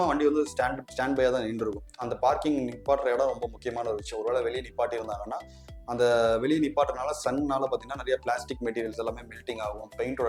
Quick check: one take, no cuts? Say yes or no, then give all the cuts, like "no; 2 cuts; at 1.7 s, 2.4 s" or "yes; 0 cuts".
yes; 0 cuts